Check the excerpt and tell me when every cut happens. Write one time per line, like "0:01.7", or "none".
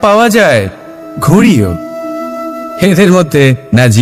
none